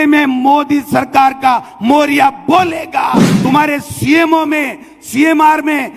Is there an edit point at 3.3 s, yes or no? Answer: yes